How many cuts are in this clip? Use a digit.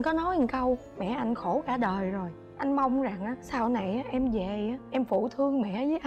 0